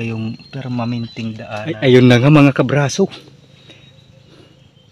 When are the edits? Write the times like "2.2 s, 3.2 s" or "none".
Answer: 1.5 s